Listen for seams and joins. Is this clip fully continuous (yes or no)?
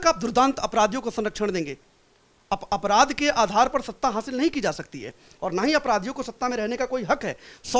yes